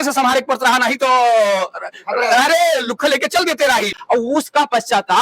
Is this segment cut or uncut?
cut